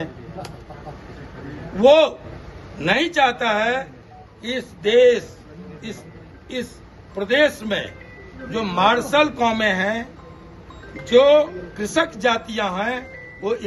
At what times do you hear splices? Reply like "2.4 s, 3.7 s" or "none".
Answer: none